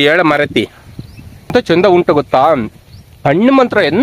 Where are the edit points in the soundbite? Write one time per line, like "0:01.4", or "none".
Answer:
0:01.5

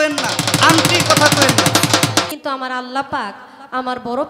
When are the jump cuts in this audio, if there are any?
0:02.3

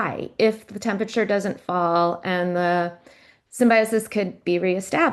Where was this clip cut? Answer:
none

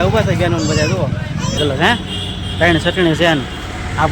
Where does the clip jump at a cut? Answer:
0:01.6

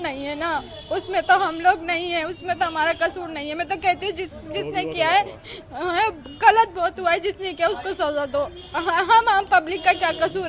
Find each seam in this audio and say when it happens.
none

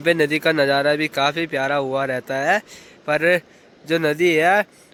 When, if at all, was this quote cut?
none

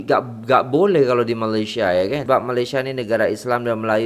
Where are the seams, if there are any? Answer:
0:02.2

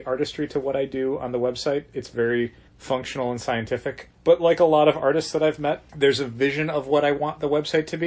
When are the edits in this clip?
0:02.7
0:05.9

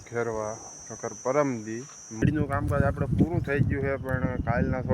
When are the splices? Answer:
0:02.2

